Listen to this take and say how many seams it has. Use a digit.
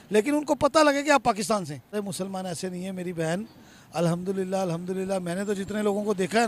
1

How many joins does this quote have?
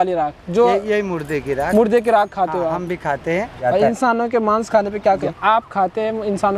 2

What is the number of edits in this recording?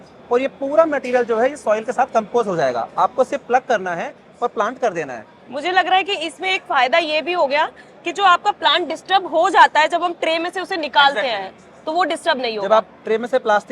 0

